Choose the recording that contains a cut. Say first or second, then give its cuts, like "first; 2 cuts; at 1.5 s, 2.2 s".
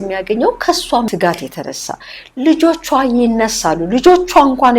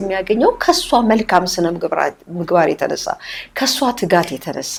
first; 1 cut; at 1.1 s